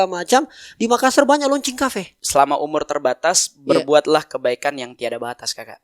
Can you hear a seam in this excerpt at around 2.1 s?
yes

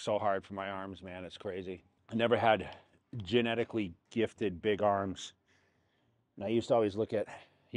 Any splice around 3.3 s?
no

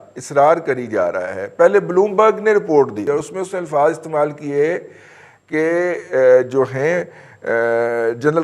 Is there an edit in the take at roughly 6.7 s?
no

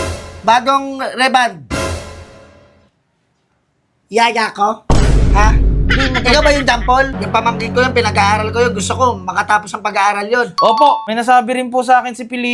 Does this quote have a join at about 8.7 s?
no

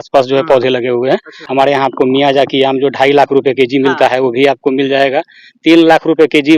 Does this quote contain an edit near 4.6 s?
no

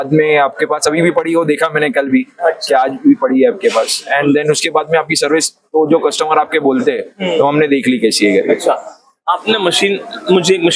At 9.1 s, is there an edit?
no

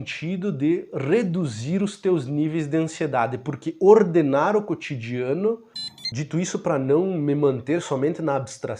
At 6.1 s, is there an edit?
yes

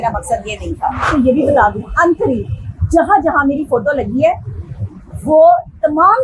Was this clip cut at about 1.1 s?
yes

